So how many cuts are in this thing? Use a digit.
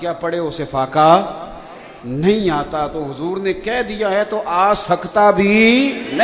0